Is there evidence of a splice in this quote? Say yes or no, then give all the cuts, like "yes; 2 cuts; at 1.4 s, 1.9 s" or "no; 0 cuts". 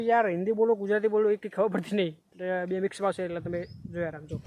no; 0 cuts